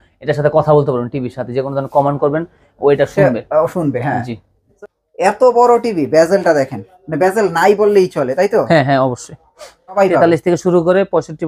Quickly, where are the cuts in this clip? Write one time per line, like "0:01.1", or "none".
0:04.7
0:10.0